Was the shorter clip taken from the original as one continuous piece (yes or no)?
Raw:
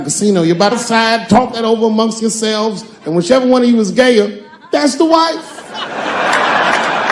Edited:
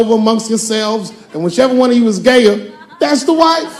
yes